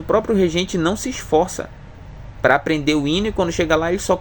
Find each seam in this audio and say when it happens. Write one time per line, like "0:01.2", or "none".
none